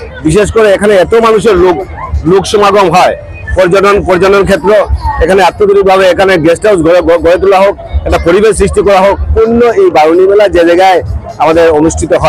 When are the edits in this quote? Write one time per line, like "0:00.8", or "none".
0:09.3